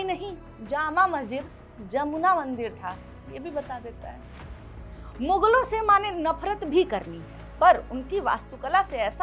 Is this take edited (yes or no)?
no